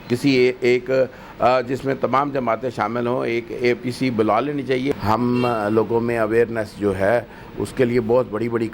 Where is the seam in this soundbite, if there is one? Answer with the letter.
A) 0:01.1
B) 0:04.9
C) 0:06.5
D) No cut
B